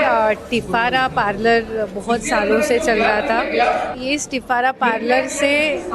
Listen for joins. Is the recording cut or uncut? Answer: cut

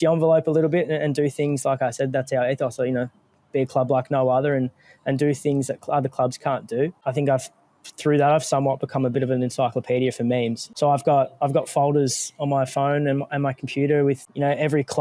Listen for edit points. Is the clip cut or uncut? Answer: cut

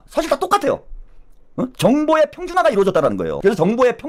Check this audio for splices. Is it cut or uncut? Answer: uncut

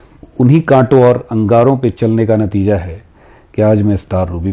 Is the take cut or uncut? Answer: uncut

